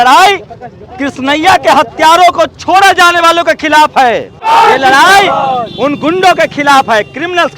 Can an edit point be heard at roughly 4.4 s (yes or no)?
yes